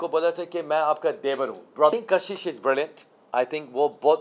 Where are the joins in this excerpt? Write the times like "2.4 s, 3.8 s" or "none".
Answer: 1.9 s